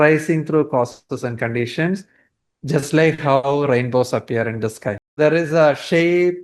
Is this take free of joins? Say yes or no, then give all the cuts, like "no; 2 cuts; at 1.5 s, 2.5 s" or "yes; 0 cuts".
no; 1 cut; at 5.2 s